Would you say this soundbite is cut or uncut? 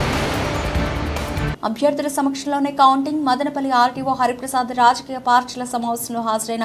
cut